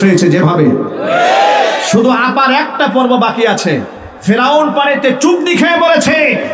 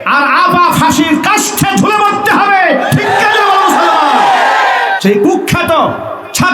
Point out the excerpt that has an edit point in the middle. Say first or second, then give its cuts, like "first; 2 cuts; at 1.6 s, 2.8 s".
second; 1 cut; at 5.0 s